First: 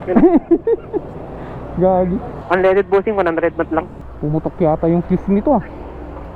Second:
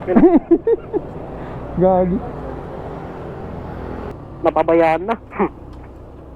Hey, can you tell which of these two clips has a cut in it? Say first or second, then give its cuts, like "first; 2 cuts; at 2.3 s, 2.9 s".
first; 2 cuts; at 2.4 s, 4.0 s